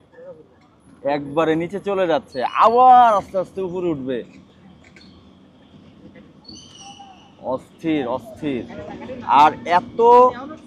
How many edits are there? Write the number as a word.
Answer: zero